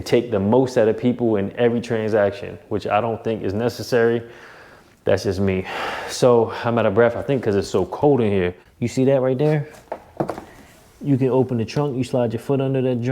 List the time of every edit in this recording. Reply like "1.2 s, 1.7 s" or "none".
8.7 s